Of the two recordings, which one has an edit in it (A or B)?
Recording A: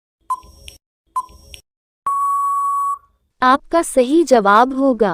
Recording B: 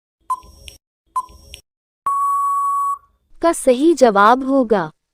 B